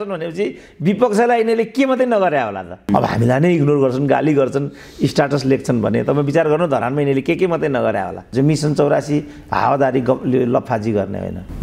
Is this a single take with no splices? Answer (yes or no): no